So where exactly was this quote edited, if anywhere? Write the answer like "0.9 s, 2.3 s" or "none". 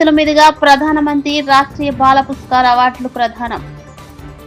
none